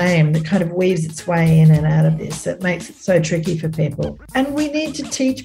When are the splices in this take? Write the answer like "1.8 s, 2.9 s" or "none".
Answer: 4.1 s